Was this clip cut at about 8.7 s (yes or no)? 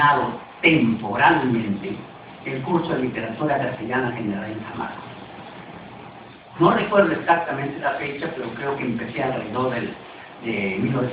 yes